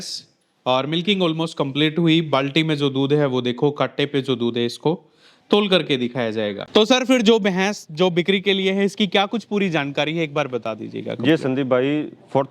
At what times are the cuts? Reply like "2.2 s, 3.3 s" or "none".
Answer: 6.7 s